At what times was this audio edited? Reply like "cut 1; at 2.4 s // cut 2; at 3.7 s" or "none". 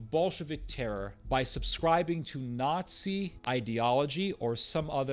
cut 1; at 1.2 s // cut 2; at 3.4 s